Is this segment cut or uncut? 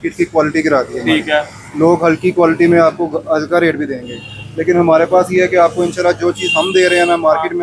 uncut